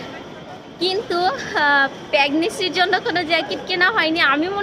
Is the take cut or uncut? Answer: uncut